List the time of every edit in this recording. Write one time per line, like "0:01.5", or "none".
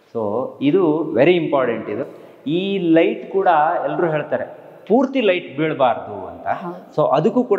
none

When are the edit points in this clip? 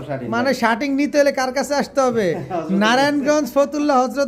none

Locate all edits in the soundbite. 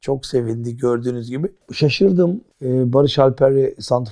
0:01.6
0:02.5

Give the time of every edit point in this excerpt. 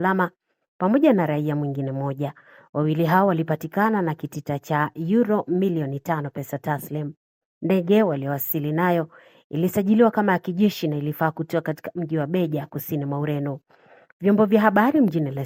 none

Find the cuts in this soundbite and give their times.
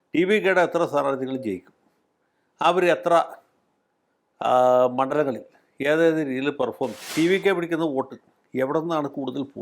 0:07.1

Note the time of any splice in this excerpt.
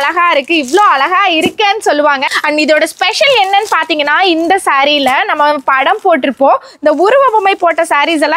0:02.3

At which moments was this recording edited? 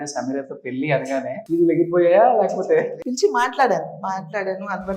0:01.4
0:03.0

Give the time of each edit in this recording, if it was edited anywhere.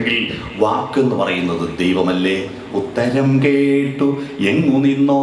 0:02.6

